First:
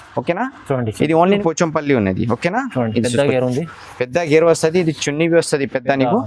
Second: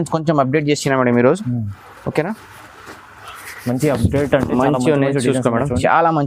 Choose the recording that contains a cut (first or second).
first